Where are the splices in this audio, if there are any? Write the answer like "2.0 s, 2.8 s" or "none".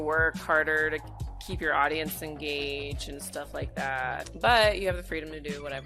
4.3 s